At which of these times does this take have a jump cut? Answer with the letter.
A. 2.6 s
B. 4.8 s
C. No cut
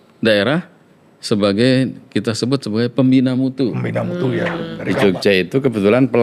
B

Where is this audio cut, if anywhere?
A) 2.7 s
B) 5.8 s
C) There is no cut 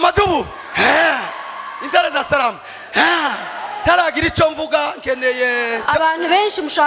B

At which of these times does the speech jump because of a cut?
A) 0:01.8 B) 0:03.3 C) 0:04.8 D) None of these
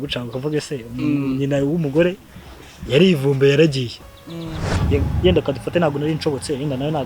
C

